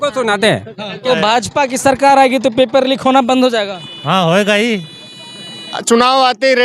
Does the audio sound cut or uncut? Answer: cut